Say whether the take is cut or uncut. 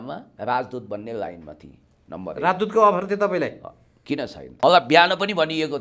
cut